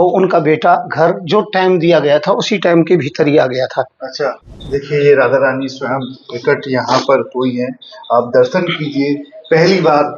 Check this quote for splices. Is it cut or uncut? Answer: cut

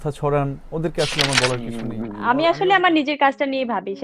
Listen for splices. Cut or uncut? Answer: cut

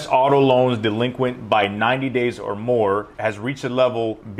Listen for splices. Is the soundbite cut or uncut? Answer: uncut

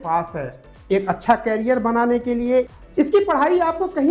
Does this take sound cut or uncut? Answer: cut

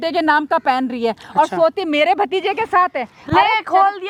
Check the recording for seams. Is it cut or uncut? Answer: uncut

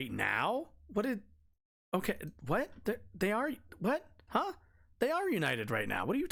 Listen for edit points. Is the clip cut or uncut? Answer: uncut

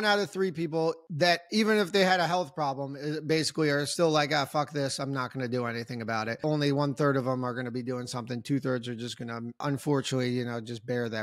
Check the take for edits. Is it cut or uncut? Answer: cut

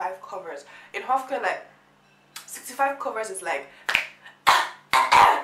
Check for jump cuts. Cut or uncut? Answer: uncut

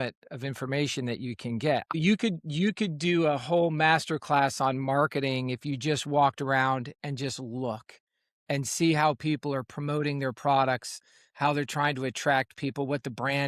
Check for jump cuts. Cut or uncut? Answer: cut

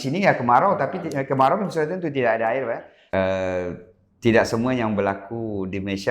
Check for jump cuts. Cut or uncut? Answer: cut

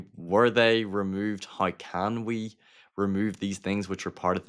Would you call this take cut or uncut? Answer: uncut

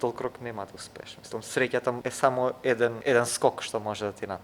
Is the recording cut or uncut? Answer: cut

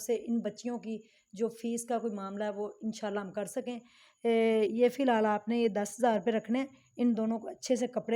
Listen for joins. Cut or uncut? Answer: uncut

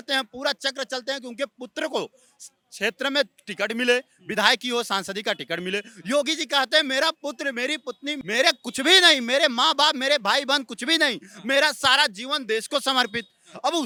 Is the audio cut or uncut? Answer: uncut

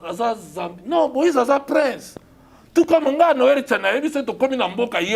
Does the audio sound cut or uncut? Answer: uncut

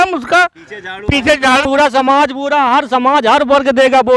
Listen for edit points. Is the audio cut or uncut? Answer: cut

